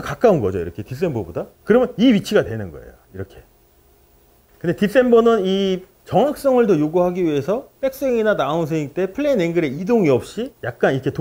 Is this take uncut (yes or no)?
yes